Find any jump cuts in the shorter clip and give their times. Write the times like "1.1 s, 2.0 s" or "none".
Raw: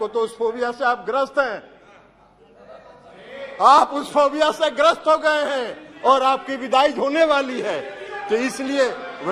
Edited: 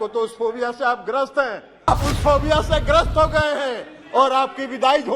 1.9 s